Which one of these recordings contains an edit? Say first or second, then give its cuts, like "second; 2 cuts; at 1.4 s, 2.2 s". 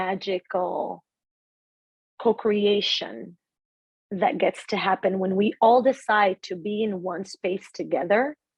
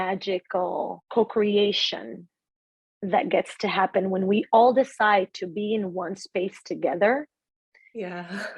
second; 1 cut; at 1.0 s